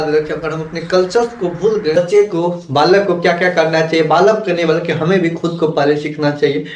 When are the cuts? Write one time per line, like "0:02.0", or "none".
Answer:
0:01.9